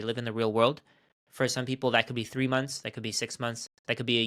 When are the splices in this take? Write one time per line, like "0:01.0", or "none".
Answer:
none